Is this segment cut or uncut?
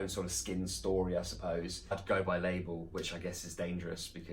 cut